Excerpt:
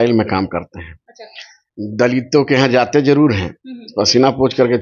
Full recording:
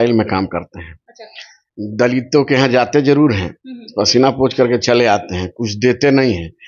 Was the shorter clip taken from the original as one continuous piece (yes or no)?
yes